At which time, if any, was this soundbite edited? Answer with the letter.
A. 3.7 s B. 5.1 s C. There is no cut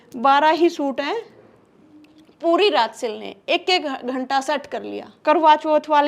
B